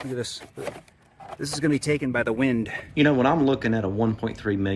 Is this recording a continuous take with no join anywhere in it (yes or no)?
no